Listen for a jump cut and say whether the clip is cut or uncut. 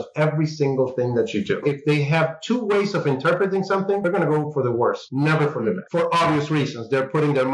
cut